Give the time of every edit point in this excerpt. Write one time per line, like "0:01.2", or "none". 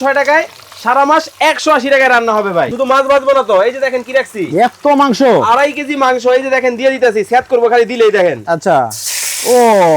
0:02.7